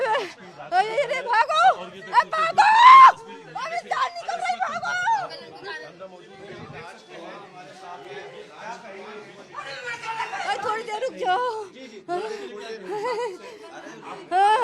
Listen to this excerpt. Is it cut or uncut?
cut